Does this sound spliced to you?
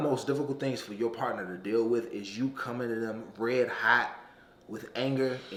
no; 0 cuts

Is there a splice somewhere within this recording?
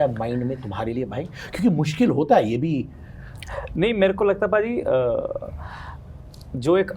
no; 0 cuts

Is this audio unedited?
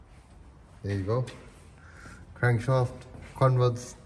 yes; 0 cuts

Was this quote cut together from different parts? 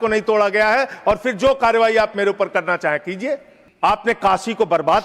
no; 0 cuts

